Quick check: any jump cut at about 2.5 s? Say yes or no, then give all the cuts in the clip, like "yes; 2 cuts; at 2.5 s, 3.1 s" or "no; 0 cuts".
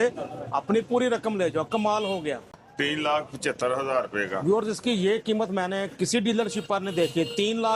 yes; 1 cut; at 2.5 s